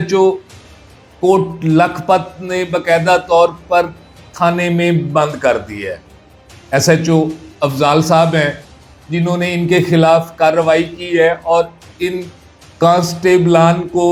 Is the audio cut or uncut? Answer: uncut